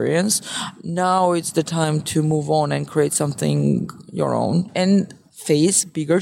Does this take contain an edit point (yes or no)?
yes